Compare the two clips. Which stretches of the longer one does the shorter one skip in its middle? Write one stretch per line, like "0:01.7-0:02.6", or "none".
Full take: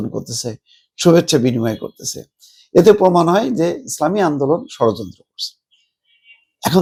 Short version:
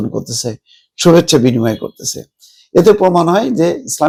none

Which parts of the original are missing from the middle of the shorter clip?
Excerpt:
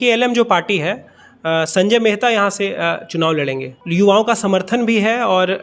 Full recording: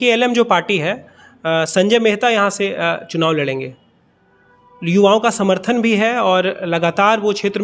0:03.7-0:04.7

